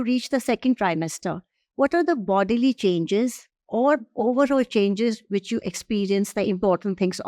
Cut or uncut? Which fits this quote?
uncut